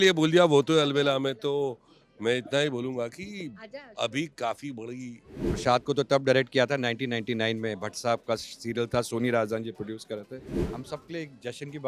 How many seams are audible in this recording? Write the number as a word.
two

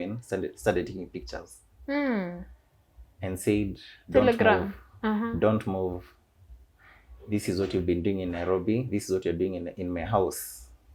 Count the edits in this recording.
zero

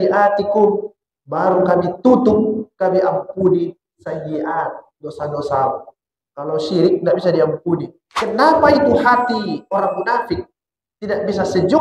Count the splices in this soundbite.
one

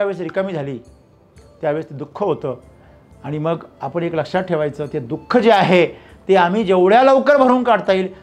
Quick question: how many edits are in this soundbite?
zero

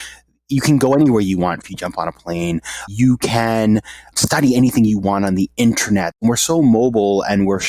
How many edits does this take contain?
four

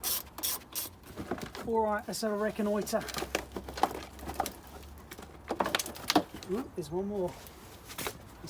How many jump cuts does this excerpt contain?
one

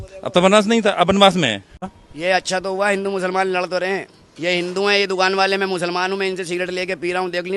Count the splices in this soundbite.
one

